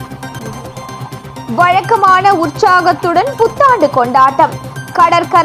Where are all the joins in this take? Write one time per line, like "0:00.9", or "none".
0:01.3